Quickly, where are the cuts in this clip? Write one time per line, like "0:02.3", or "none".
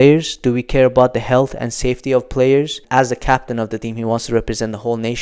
0:02.8